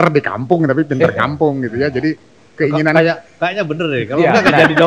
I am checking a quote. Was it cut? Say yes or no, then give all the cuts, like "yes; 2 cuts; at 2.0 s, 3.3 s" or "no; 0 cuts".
no; 0 cuts